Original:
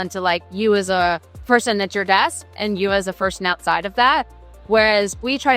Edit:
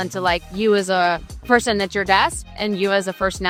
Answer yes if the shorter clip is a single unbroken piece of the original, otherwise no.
yes